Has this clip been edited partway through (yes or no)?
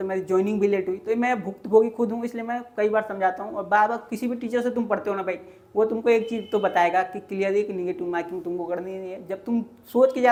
no